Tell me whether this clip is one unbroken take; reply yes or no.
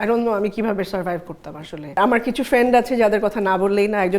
no